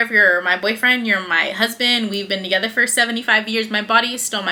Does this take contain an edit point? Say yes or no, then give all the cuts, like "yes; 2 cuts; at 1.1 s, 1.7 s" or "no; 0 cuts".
no; 0 cuts